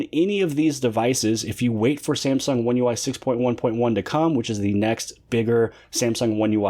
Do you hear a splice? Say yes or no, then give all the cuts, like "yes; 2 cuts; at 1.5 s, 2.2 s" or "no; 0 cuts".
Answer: no; 0 cuts